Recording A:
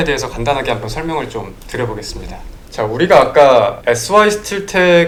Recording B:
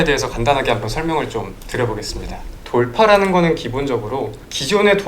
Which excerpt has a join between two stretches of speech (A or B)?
B